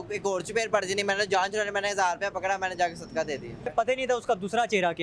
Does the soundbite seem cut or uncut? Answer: cut